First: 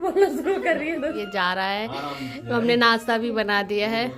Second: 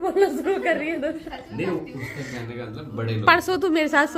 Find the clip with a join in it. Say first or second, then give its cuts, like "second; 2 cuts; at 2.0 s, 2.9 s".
first; 1 cut; at 1.2 s